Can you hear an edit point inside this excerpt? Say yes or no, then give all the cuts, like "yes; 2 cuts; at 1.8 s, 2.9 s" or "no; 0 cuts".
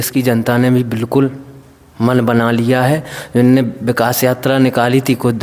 no; 0 cuts